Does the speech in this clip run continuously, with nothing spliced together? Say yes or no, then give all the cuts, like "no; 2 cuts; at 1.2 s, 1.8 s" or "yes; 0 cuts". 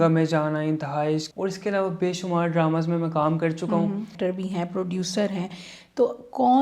no; 2 cuts; at 1.3 s, 4.1 s